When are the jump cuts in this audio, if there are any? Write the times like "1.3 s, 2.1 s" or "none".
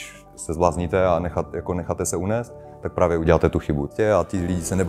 3.9 s